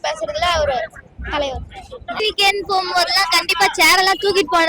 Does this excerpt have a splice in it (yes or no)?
yes